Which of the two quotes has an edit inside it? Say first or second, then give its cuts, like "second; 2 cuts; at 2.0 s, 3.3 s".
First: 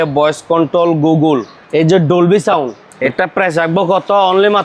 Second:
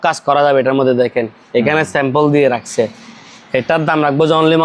first; 2 cuts; at 1.6 s, 2.8 s